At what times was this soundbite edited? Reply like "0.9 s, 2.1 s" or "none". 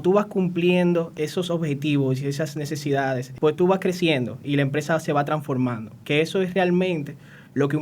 1.1 s, 3.3 s

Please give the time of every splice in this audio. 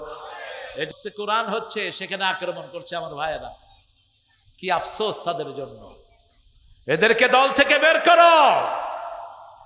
0.9 s

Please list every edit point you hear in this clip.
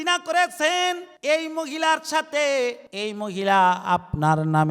1.1 s, 2.9 s

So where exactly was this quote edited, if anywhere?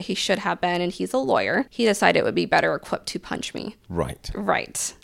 1.7 s

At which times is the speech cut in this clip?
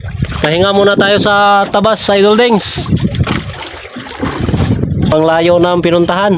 5.1 s

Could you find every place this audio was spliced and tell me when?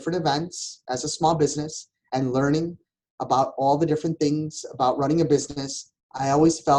none

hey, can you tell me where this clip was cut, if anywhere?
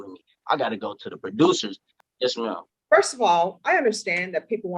1.9 s

